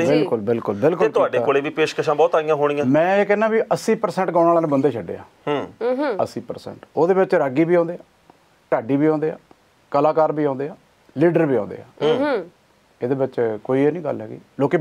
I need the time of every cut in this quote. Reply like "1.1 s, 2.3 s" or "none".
none